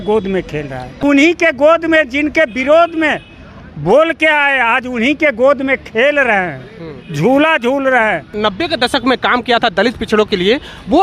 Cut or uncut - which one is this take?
cut